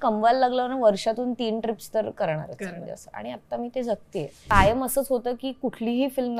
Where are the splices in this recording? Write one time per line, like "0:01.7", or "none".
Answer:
0:04.3